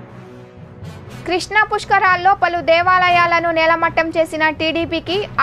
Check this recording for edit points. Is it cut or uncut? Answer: cut